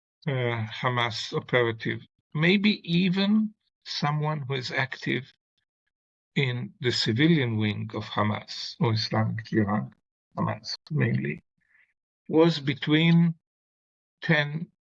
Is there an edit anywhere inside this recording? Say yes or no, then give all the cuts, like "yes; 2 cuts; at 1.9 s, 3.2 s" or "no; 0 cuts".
no; 0 cuts